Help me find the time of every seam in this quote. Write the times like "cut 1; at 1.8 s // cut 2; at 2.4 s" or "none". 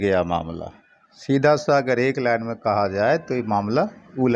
none

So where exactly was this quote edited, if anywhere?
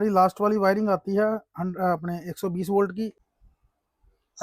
cut 1; at 3.2 s

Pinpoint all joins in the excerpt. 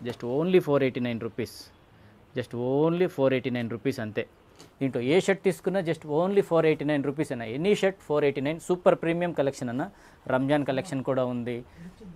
cut 1; at 4.4 s

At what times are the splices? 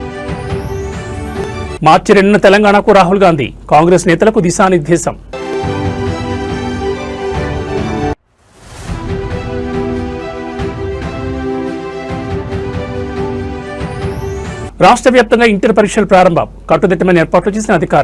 none

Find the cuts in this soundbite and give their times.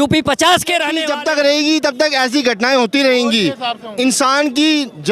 cut 1; at 1.0 s

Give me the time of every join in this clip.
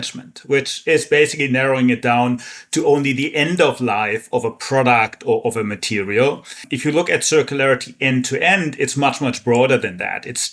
cut 1; at 6.7 s

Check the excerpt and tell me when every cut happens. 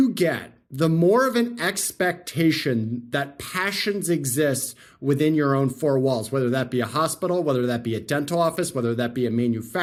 none

